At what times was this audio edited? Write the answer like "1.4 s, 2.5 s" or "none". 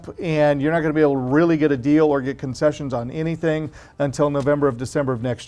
none